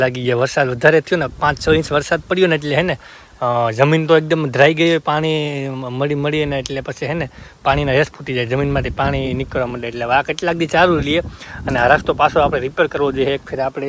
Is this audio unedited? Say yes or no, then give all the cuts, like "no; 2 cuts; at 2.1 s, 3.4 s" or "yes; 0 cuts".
yes; 0 cuts